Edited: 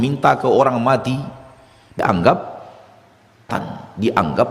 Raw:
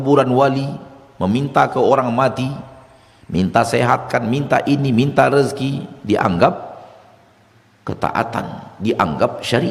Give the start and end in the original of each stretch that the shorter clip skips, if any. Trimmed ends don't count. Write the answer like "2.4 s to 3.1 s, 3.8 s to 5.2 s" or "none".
3.3 s to 6.2 s, 7.6 s to 8.3 s